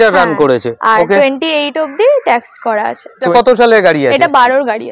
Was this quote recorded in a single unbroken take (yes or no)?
no